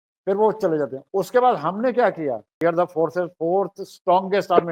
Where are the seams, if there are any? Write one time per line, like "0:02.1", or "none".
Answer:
0:02.5